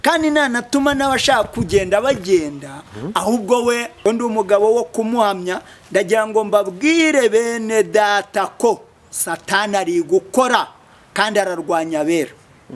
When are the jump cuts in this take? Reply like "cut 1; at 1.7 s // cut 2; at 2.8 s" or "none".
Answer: cut 1; at 3.9 s